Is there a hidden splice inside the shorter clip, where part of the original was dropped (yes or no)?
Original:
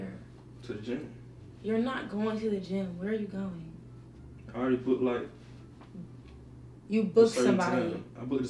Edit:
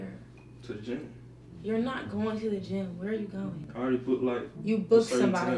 yes